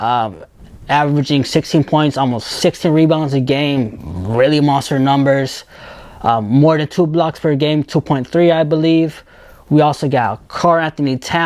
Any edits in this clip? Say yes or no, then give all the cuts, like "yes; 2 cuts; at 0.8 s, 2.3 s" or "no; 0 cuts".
no; 0 cuts